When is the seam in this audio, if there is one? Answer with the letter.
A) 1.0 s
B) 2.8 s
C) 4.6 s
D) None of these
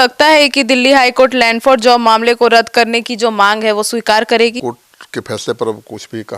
C